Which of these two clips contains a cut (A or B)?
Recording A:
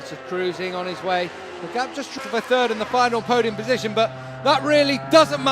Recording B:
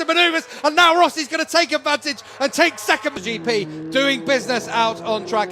A